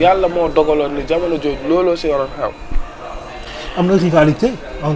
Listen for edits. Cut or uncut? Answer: uncut